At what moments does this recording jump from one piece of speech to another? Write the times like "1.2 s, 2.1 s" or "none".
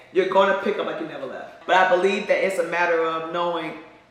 1.5 s